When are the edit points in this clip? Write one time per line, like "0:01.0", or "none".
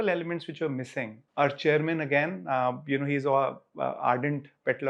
0:01.2